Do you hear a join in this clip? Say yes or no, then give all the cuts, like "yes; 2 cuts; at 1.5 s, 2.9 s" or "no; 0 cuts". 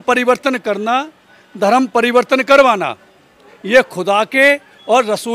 no; 0 cuts